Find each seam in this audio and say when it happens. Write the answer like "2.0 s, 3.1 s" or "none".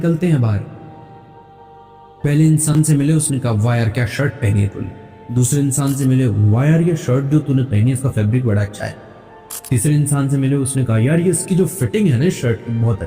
5.3 s